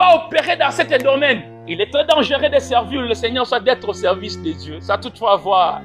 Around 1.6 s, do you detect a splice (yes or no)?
yes